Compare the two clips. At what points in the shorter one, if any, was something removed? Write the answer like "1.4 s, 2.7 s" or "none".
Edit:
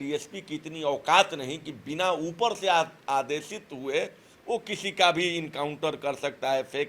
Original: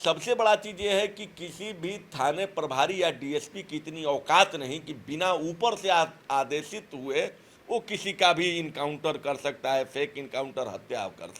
none